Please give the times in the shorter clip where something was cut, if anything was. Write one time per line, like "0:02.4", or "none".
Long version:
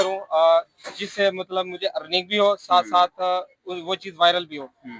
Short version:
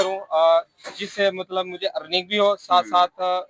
none